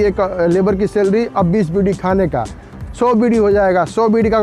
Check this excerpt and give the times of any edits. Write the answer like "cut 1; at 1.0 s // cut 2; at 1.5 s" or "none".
none